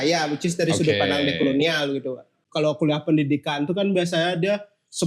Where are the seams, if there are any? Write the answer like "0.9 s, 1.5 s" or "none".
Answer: 2.4 s